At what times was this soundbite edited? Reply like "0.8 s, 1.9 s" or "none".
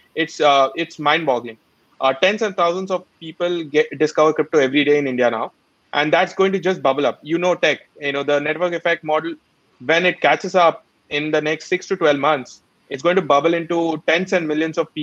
none